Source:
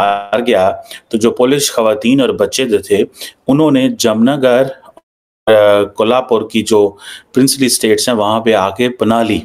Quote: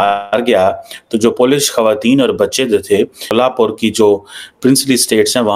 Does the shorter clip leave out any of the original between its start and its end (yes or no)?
yes